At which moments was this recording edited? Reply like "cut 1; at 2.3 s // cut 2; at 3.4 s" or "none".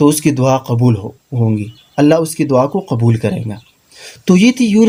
none